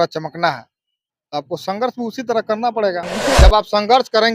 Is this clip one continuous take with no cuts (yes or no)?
no